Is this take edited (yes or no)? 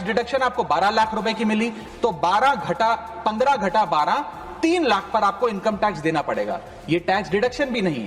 no